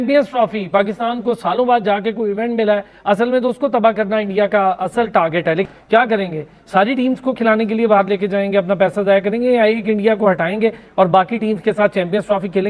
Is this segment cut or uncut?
uncut